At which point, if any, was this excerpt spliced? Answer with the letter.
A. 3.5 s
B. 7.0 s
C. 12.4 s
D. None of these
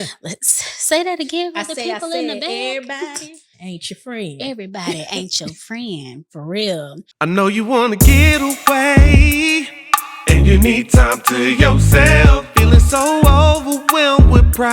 B